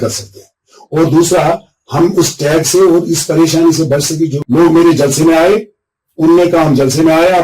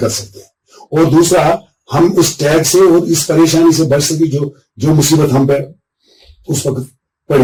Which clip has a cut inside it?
first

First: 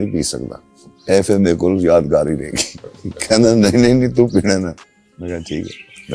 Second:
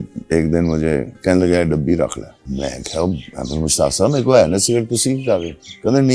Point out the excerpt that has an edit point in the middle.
second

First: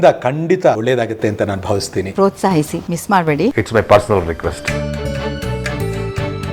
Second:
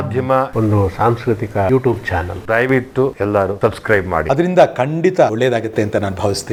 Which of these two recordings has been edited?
first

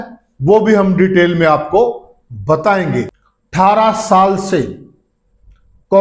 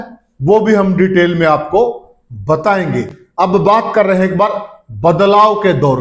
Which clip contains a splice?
first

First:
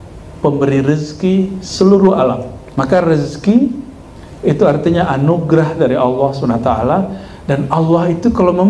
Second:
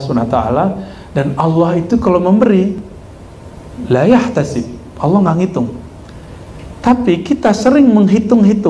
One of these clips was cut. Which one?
first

